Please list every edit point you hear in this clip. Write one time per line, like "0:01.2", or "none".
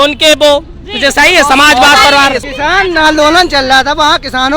0:02.4